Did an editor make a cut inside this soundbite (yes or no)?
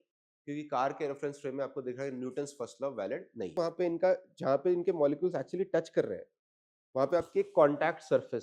yes